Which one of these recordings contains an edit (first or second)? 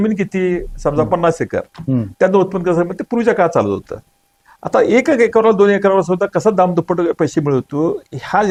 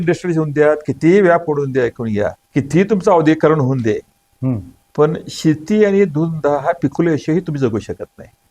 second